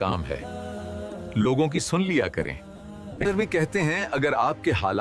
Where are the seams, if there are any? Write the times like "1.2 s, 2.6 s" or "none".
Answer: none

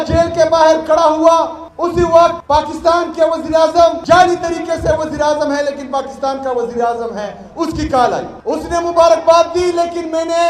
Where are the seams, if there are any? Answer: 1.6 s, 2.4 s, 4.0 s, 8.3 s

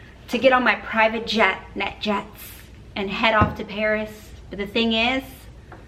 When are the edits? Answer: none

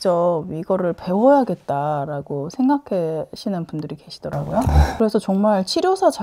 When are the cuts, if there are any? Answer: none

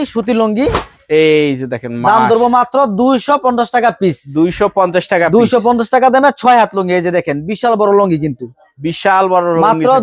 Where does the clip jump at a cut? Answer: none

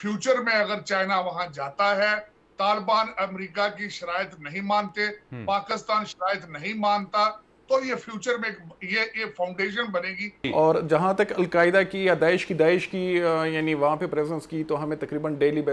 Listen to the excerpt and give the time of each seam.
10.4 s

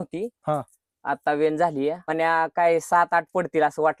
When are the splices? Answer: 2.0 s

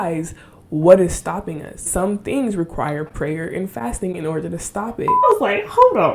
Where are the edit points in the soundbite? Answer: 1.9 s, 5.2 s

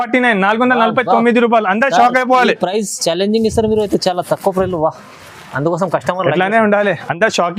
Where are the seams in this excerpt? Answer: none

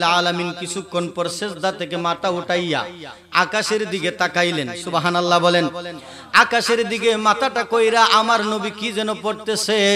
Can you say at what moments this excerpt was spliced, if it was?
none

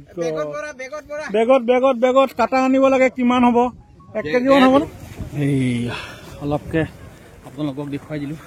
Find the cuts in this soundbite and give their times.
4.8 s

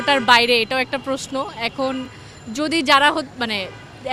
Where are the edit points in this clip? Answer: none

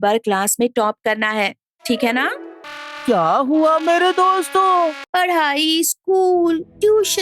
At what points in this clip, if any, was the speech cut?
2.6 s, 5.0 s

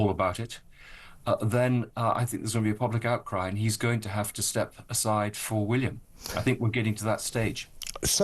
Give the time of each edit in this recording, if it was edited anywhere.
none

